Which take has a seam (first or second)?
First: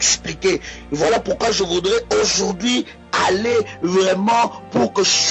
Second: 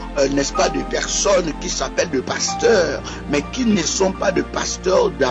first